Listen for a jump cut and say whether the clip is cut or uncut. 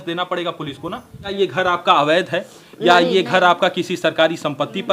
cut